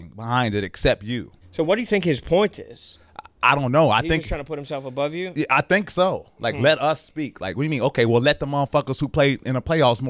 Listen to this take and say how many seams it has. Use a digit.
0